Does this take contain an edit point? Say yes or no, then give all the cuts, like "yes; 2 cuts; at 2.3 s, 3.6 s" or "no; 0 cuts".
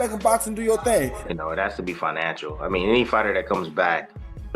yes; 1 cut; at 1.2 s